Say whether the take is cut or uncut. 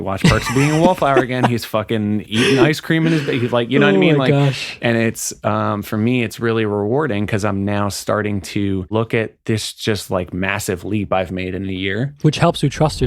cut